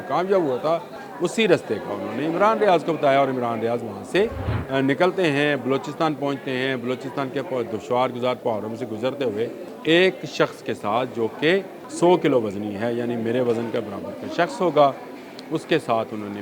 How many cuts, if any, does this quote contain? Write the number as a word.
four